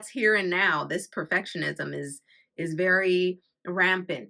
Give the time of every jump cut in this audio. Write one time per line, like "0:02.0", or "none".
none